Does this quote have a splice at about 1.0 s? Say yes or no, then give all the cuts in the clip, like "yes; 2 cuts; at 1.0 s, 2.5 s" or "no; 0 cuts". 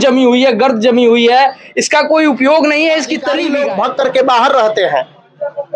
no; 1 cut; at 3.4 s